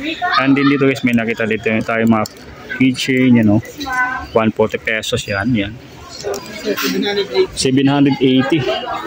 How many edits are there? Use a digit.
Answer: 1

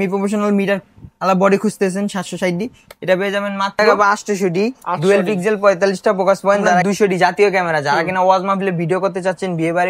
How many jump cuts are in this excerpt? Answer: 2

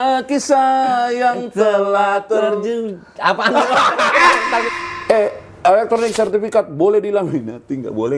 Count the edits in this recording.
1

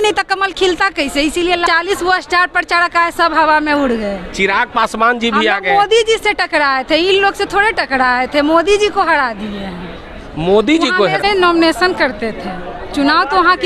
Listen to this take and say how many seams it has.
2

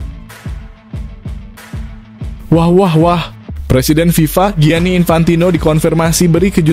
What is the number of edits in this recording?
1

